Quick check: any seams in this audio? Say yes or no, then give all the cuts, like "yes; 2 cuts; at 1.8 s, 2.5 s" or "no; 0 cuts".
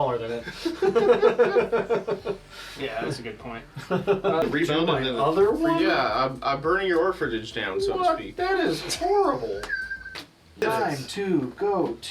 yes; 2 cuts; at 4.4 s, 10.6 s